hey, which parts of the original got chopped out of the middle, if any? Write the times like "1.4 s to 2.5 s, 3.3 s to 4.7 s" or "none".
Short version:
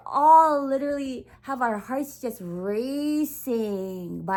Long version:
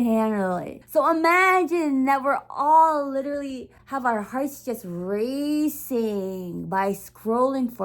none